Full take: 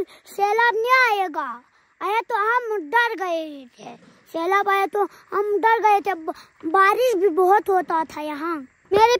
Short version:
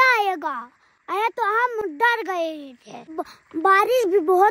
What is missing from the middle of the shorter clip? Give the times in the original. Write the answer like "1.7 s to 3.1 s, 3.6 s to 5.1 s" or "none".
4.2 s to 6.3 s